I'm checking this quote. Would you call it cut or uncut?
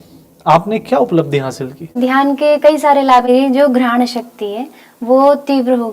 cut